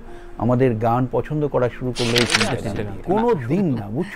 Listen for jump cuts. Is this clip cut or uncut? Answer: cut